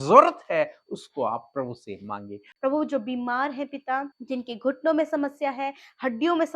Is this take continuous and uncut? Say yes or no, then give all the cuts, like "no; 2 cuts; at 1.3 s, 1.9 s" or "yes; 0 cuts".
no; 2 cuts; at 2.4 s, 4.2 s